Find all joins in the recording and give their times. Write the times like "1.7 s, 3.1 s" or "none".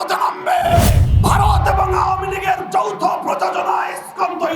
1.0 s